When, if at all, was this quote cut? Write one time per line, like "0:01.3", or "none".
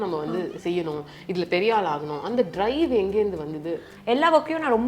0:03.9